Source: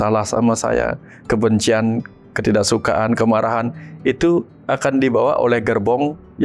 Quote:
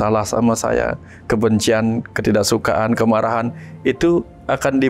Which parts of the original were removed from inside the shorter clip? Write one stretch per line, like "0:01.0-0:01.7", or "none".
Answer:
0:02.1-0:02.3

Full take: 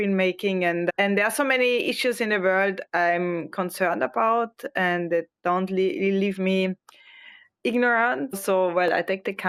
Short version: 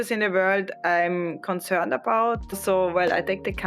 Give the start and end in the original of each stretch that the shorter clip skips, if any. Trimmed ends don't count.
0:04.6-0:08.3

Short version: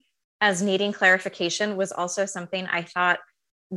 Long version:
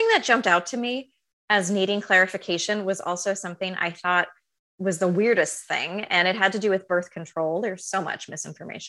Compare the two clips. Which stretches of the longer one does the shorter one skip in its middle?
none

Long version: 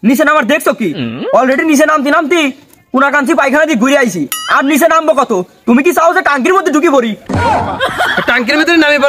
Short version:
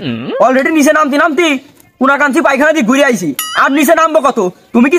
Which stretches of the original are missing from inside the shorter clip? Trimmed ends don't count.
none

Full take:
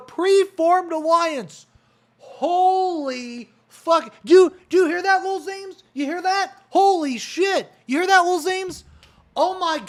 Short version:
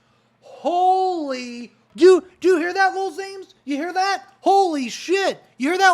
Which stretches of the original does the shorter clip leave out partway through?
0:03.6-0:04.1

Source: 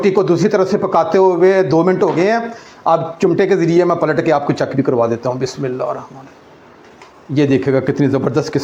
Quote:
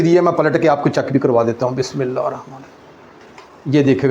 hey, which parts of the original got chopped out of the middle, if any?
none

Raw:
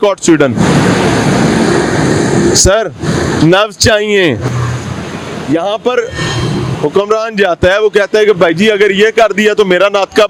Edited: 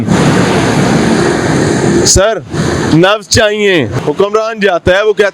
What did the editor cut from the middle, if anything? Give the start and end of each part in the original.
0:04.5-0:06.7

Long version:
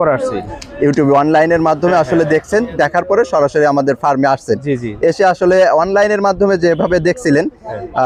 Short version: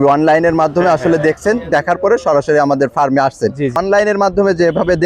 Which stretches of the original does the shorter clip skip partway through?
0:04.9-0:05.8

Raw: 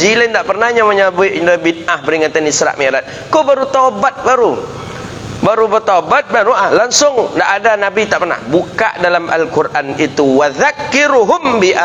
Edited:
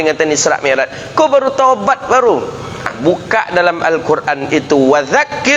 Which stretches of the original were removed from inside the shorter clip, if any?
0:05.1-0:08.4

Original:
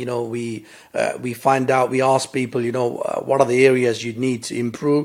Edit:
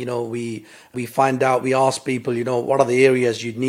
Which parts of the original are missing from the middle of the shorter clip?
0:00.9-0:01.2
0:02.9-0:03.2

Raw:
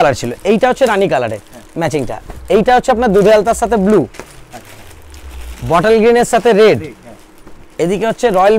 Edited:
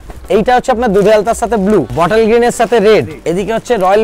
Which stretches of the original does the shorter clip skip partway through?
0:04.1-0:05.6
0:06.9-0:07.7

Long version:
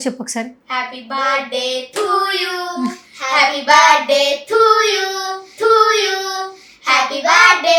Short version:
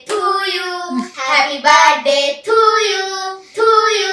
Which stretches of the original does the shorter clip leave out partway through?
0:03.0-0:03.2

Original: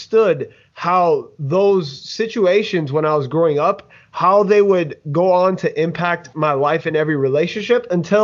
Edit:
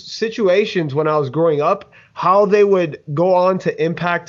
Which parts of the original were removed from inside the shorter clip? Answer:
none

